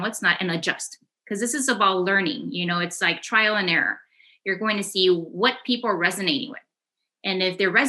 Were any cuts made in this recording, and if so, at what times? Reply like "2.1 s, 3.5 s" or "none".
none